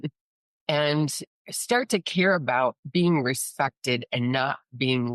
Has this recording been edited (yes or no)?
no